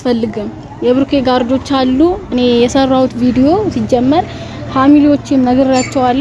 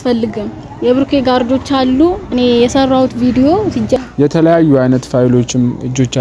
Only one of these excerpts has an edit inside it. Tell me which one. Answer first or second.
second